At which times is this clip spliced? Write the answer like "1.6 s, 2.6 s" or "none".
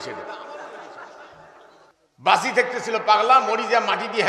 1.9 s